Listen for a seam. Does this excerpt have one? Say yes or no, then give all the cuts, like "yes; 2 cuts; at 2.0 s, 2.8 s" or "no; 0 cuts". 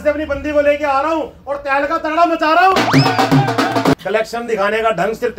yes; 1 cut; at 4.0 s